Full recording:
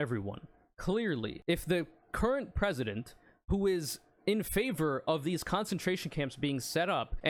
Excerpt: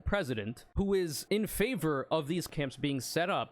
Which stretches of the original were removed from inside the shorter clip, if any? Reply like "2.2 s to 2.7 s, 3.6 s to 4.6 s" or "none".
3.4 s to 3.9 s, 5.4 s to 6.1 s